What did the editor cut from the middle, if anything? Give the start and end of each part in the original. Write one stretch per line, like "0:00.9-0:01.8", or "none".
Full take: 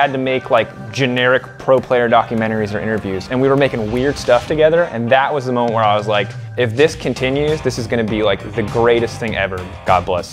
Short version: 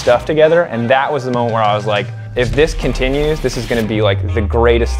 none

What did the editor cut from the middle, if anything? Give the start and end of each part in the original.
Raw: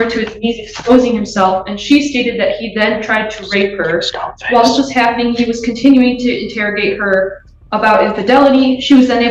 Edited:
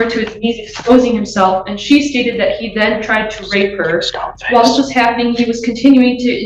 none

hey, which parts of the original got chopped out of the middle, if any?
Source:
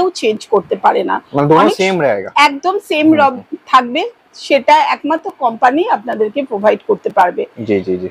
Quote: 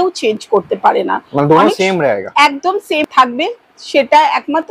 0:03.0-0:03.6

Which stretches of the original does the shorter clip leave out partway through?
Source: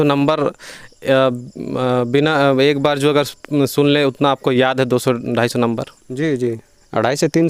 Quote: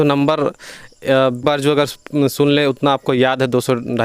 0:01.4-0:02.8

